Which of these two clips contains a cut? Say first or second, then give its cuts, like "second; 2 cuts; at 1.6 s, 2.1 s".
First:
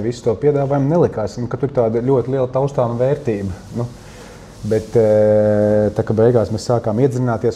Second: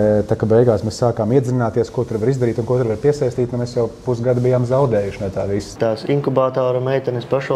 second; 1 cut; at 5.7 s